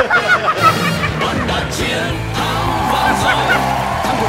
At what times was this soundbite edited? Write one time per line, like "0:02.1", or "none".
none